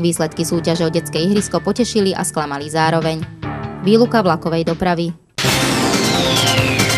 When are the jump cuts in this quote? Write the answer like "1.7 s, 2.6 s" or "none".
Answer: 5.2 s